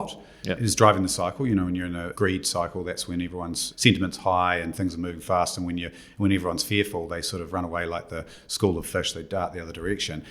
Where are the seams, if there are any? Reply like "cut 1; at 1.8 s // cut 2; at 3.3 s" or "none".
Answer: cut 1; at 2.1 s // cut 2; at 3.7 s